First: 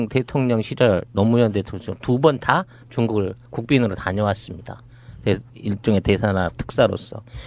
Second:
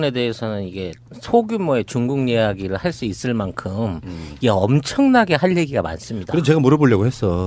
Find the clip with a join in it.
first; 1 cut; at 2.6 s

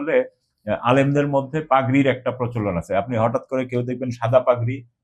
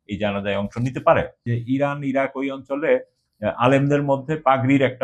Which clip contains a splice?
second; 1 cut; at 1.5 s

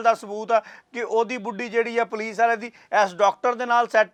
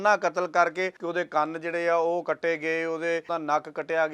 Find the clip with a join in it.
second; 2 cuts; at 1.0 s, 3.3 s

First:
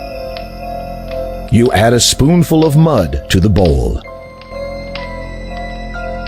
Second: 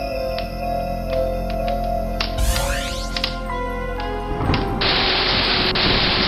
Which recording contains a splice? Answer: first; 2 cuts; at 1.5 s, 4.3 s

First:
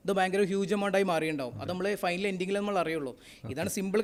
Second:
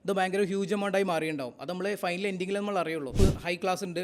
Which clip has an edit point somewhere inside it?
second; 1 cut; at 3.1 s

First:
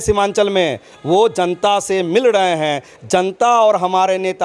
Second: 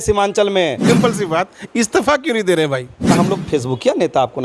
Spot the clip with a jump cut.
second; 2 cuts; at 0.8 s, 3.2 s

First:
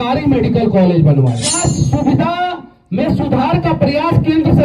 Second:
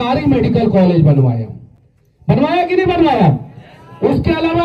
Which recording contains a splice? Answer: first; 1 cut; at 1.6 s

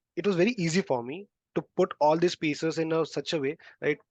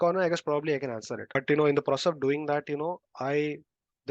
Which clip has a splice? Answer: second; 1 cut; at 1.4 s

